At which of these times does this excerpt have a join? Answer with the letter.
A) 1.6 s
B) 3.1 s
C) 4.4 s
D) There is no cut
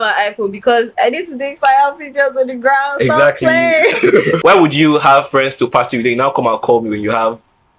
C